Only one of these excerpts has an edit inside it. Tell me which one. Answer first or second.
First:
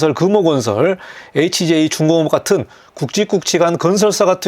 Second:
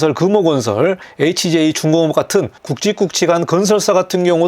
second